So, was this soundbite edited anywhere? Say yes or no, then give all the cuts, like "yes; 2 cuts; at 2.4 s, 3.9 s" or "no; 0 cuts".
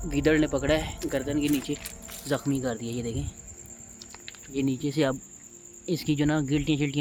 no; 0 cuts